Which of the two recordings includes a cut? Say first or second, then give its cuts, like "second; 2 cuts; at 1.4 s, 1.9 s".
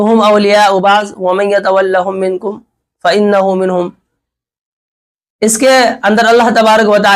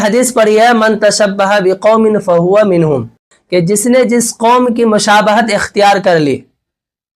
second; 1 cut; at 3.3 s